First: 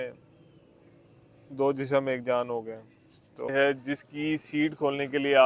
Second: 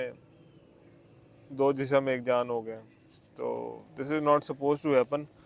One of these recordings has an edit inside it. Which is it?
first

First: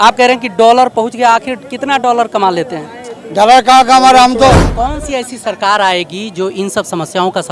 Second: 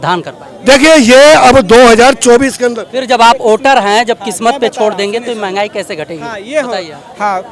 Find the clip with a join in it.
first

